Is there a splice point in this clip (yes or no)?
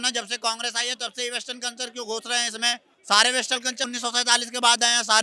yes